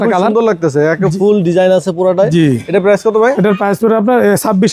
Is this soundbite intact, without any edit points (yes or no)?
yes